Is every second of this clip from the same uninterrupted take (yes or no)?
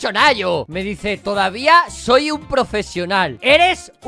yes